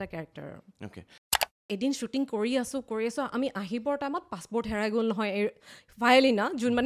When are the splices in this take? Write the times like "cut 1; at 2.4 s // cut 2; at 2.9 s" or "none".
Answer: cut 1; at 1.6 s